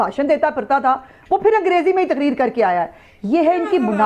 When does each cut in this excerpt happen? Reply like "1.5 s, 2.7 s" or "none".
none